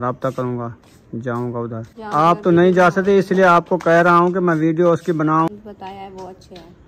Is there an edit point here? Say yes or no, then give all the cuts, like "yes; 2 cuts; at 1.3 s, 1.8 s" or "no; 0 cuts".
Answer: yes; 2 cuts; at 2.0 s, 5.5 s